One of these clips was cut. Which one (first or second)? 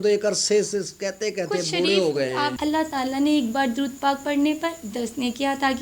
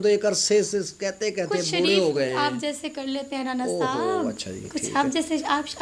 first